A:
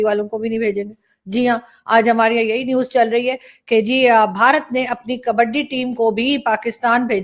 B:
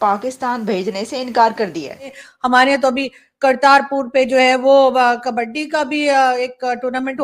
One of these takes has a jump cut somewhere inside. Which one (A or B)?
B